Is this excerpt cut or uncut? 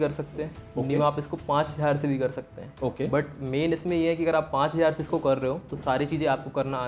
uncut